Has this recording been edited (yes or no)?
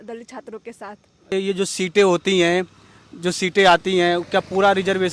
yes